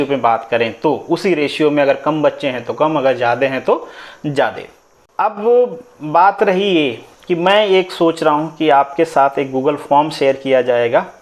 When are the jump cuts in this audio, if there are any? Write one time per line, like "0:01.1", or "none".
0:05.0